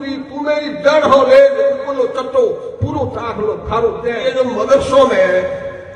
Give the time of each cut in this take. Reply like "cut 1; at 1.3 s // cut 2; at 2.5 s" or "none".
cut 1; at 4.2 s